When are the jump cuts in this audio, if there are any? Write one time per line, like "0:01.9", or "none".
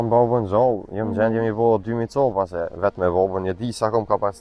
none